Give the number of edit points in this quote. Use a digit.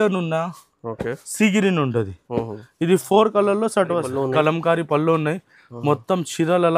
1